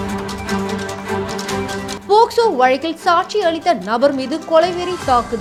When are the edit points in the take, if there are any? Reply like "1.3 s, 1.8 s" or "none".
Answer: none